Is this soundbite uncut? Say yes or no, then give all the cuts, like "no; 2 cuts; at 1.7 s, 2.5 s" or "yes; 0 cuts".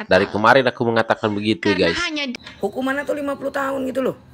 no; 1 cut; at 2.0 s